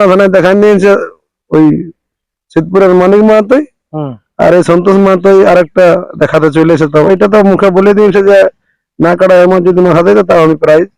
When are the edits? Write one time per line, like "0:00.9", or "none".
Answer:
0:07.1

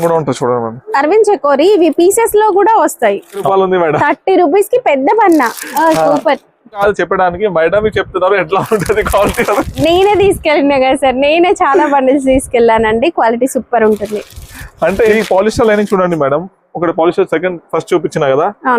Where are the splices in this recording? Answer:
0:03.5
0:06.8
0:15.1

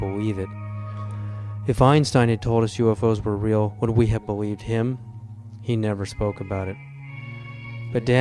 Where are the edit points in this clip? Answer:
0:06.2

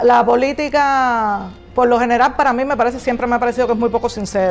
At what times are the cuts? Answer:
0:01.5

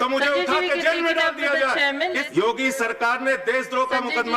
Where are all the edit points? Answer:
0:02.2

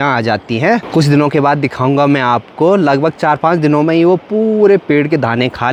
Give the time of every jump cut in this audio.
none

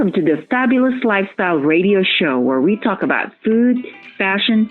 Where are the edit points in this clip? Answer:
none

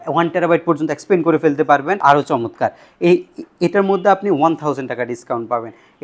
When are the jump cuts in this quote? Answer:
0:02.0

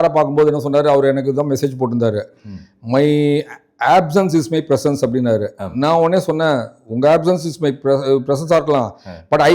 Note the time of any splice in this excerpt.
none

